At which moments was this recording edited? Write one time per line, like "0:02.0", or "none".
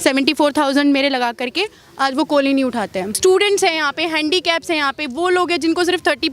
0:03.1

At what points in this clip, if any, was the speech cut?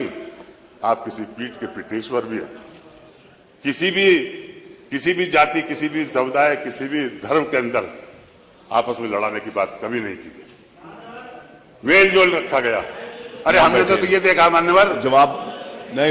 none

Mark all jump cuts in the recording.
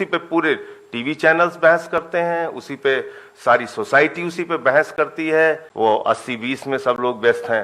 0:05.7

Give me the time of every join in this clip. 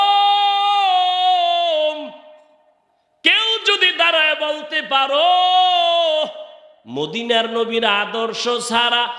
none

